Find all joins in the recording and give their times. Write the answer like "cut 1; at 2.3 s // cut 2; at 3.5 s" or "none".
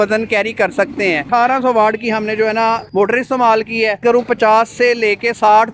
cut 1; at 1.2 s // cut 2; at 4.0 s